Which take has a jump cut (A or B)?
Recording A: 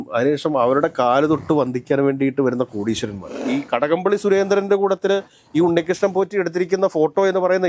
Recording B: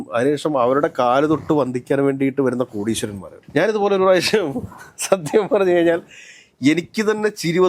A